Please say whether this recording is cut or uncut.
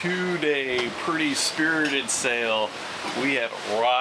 uncut